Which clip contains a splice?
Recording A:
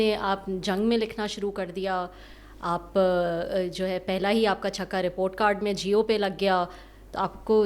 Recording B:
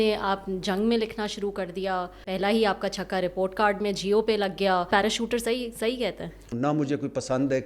B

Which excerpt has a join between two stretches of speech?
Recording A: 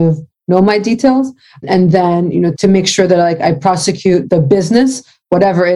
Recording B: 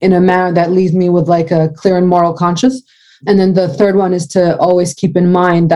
A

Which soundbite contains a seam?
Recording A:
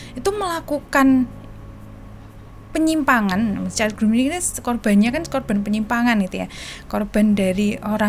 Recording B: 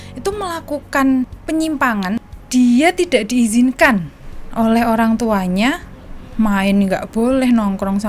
B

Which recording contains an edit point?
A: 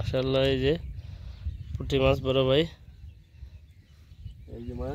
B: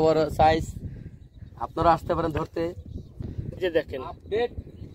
B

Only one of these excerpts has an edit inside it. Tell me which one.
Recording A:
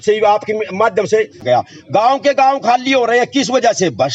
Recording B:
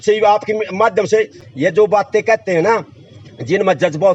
A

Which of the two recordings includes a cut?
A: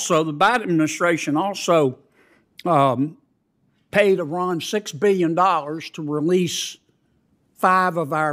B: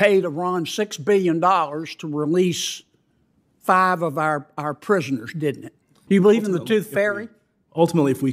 B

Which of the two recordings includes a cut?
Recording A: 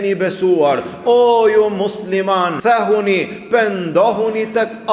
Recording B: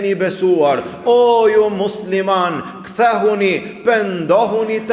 A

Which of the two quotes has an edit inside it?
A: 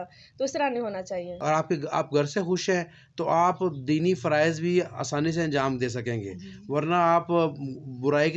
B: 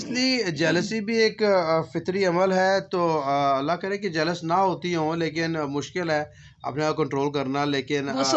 A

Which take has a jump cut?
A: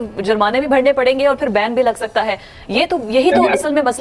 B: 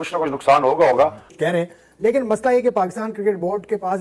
B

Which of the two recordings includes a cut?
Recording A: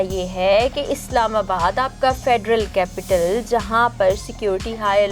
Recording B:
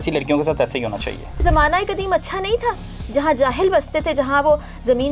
B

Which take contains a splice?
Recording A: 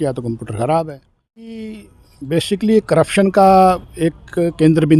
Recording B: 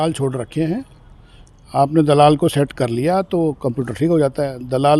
A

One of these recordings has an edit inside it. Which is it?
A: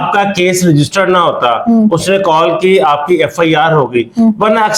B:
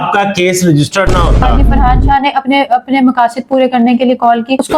B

